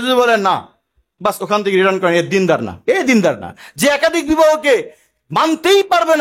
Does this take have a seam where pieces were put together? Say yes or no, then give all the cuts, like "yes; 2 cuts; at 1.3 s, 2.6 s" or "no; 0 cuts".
no; 0 cuts